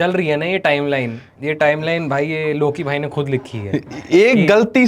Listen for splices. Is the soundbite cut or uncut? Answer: uncut